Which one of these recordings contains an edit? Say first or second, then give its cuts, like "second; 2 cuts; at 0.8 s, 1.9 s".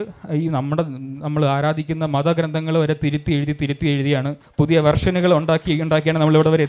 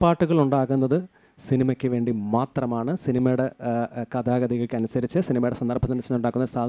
first; 1 cut; at 4.4 s